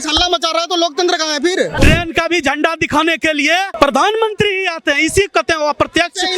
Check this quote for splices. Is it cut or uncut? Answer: cut